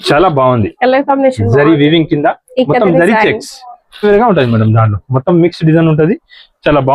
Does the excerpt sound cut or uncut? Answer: cut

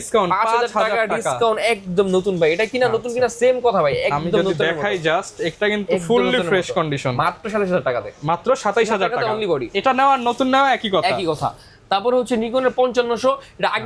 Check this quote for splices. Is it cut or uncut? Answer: uncut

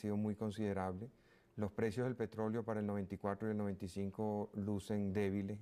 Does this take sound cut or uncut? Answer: uncut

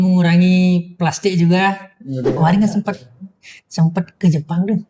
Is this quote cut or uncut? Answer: cut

